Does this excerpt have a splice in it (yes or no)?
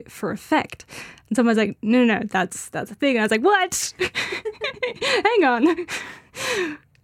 no